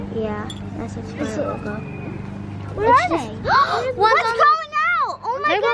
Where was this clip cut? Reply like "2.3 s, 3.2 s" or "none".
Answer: none